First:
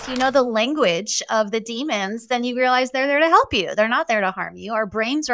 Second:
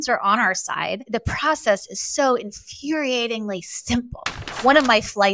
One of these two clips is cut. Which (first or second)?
second